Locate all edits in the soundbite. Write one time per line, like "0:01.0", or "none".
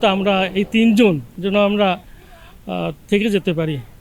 0:01.3